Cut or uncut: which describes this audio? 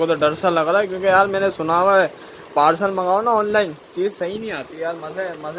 uncut